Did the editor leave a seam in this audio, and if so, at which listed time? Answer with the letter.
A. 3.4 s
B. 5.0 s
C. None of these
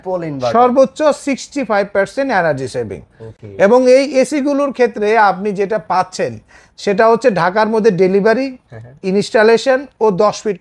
C